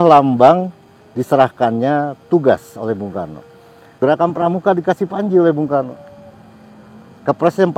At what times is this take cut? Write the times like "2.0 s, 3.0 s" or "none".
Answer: 4.0 s